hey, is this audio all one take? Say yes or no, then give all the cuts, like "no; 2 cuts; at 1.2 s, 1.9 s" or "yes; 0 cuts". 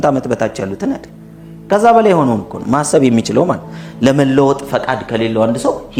yes; 0 cuts